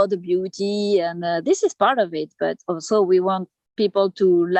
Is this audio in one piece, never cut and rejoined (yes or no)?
yes